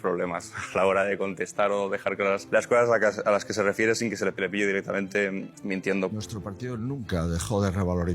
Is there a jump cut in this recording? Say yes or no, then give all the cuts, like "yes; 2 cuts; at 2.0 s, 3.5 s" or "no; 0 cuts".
yes; 3 cuts; at 2.4 s, 4.4 s, 6.1 s